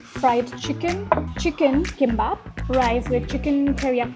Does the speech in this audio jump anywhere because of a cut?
no; 0 cuts

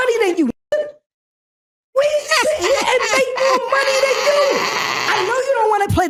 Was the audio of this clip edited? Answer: no; 0 cuts

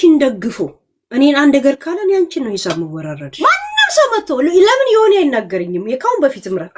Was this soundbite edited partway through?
yes; 1 cut; at 3.2 s

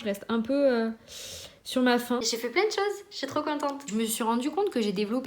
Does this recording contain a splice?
yes; 2 cuts; at 2.3 s, 3.8 s

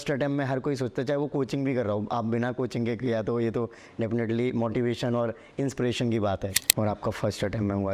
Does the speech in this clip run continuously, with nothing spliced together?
no; 1 cut; at 6.6 s

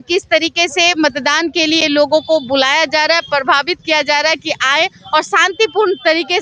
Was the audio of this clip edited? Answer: no; 0 cuts

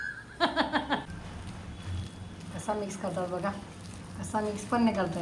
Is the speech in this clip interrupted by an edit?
yes; 1 cut; at 1.0 s

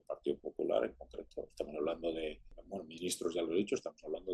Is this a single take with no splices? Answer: no; 1 cut; at 2.6 s

